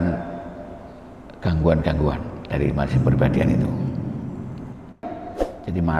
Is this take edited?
yes; 1 cut; at 5.0 s

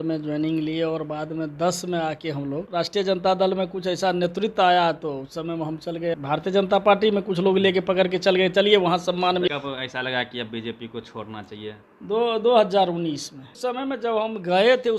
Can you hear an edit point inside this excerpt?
yes; 4 cuts; at 2.7 s, 6.2 s, 9.5 s, 13.5 s

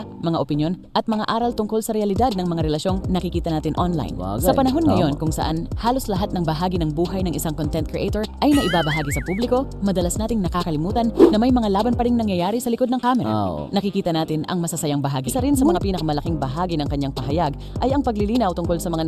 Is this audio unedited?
no; 1 cut; at 15.8 s

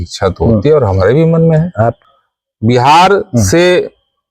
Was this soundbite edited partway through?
yes; 1 cut; at 2.0 s

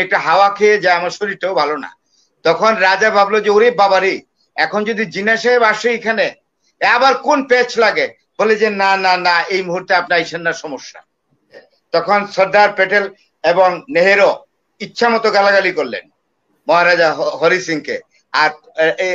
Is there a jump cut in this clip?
yes; 1 cut; at 11.7 s

